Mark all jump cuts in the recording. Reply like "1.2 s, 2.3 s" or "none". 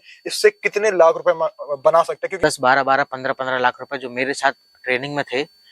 2.4 s